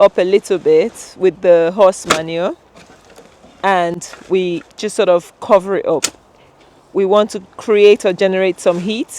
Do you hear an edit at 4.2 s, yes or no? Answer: no